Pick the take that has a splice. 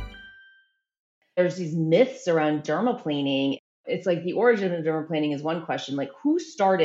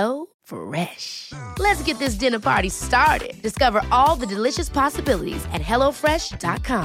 first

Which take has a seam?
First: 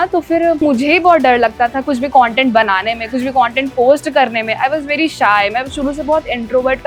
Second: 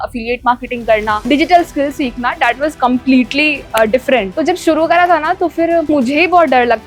second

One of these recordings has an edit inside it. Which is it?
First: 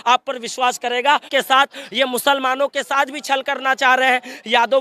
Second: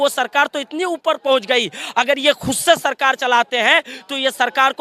first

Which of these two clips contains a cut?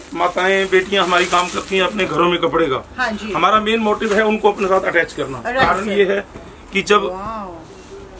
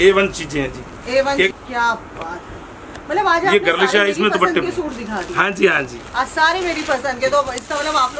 second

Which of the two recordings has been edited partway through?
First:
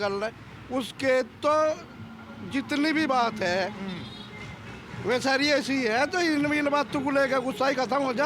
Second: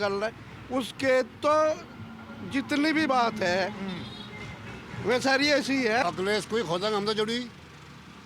second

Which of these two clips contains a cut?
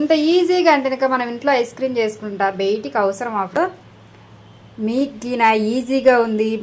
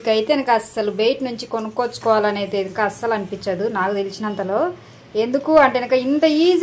first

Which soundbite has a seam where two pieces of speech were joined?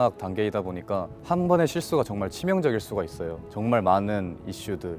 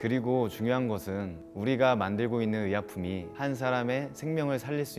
first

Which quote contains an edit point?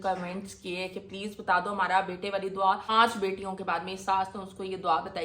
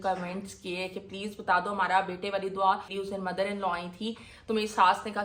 first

